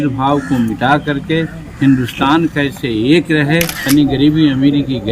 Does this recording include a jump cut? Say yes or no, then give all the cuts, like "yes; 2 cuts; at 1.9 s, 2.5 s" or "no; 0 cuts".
yes; 1 cut; at 3.8 s